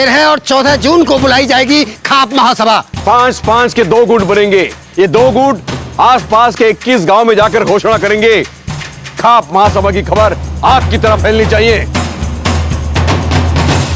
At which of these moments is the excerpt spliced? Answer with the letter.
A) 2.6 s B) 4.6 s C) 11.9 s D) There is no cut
C